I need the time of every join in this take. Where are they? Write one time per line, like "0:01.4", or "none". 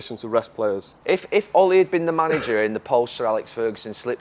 0:00.9